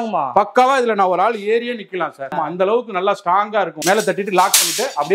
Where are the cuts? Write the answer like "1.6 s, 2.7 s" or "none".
2.3 s, 3.8 s